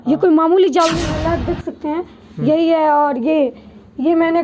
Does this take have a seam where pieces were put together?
yes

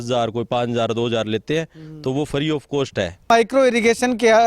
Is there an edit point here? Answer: yes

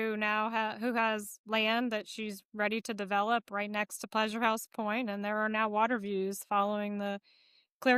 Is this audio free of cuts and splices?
yes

